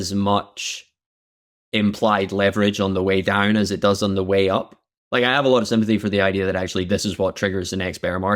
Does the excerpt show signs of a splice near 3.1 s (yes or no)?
no